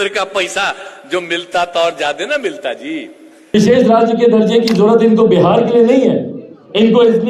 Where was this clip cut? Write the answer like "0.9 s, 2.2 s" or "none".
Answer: 3.5 s